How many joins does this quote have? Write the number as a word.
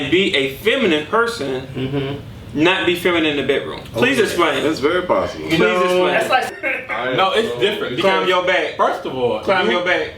one